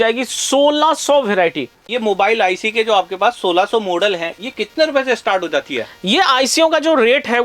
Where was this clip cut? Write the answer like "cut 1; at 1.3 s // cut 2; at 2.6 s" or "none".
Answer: cut 1; at 1.9 s